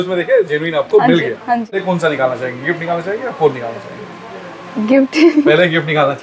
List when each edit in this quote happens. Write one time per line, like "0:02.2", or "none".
0:01.8